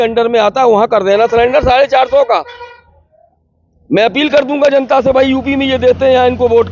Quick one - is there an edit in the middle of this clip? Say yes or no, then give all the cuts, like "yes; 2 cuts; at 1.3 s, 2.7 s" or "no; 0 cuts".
no; 0 cuts